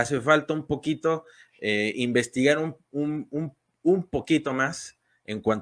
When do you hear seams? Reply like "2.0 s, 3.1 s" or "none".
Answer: none